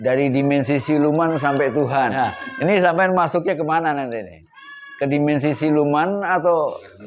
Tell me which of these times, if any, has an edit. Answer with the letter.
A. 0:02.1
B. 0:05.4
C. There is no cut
A